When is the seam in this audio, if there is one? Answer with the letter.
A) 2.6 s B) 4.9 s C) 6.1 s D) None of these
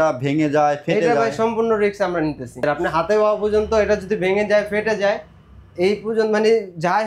A